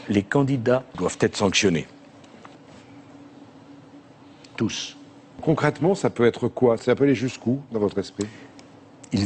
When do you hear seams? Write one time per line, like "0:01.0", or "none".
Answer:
0:04.8